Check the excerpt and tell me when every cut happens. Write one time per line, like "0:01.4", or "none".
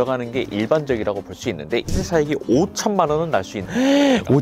0:01.9